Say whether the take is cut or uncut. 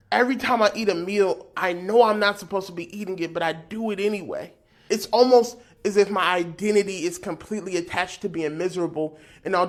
uncut